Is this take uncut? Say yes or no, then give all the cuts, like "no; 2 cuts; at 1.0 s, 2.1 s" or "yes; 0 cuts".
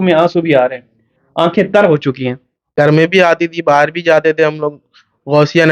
no; 1 cut; at 2.6 s